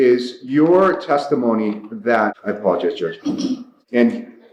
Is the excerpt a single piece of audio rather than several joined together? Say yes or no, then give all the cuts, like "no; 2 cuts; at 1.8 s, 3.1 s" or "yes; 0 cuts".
yes; 0 cuts